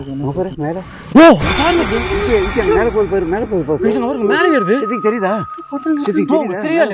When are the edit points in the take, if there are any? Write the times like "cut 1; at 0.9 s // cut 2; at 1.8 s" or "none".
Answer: none